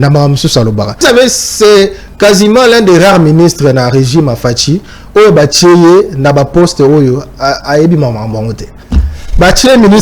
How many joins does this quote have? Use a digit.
1